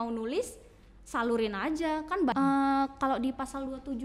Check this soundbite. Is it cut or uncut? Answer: cut